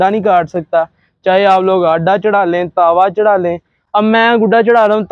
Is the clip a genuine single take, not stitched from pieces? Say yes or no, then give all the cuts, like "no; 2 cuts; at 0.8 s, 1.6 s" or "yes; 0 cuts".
yes; 0 cuts